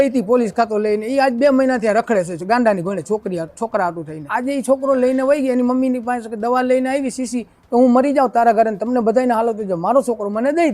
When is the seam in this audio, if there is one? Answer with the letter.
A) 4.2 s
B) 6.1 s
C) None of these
A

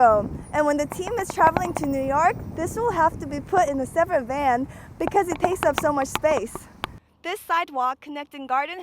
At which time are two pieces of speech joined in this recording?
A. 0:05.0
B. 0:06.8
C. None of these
B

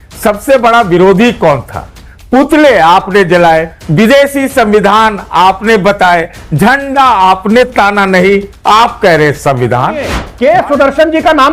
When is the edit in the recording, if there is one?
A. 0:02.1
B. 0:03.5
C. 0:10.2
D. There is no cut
C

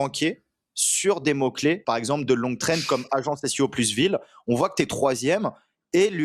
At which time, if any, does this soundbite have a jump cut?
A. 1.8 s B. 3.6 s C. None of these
A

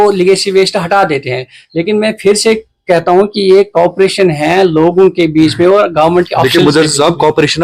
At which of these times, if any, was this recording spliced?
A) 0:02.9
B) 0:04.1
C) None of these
C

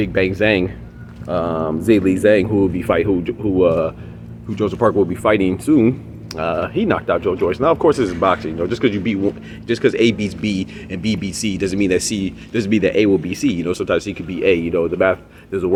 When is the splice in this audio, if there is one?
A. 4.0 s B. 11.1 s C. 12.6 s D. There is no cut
D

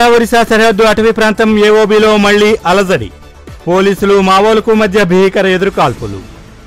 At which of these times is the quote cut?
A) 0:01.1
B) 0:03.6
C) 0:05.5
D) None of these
D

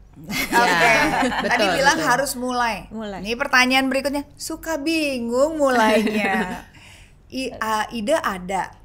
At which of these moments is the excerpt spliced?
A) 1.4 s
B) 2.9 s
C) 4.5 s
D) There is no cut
D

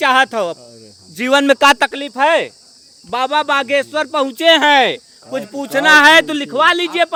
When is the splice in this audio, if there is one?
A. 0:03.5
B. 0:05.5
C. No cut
C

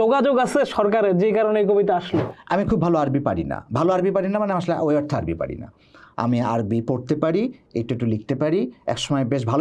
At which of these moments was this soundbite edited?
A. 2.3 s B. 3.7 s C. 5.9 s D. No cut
A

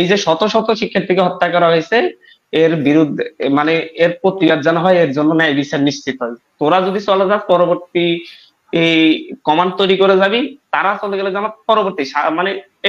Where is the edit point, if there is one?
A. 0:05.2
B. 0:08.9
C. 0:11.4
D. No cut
D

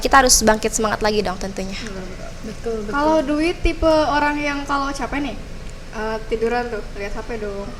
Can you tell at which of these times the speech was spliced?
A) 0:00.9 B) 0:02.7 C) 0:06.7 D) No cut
D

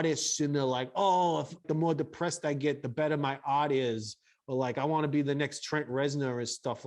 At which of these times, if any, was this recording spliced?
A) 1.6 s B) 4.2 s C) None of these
A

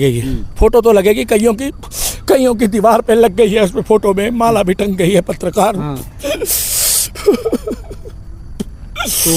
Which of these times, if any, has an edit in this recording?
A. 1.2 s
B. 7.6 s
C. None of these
C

